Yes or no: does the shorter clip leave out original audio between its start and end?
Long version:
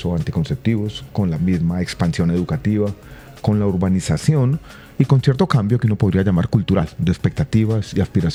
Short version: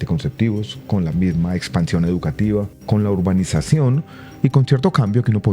yes